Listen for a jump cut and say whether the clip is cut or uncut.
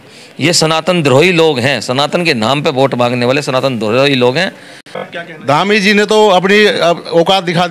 cut